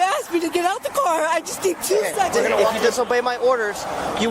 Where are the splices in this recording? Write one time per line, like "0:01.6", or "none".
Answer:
0:02.8